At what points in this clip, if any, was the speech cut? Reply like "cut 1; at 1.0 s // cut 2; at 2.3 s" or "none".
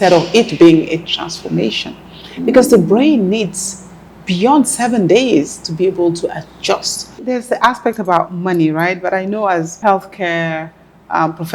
cut 1; at 7.2 s // cut 2; at 9.7 s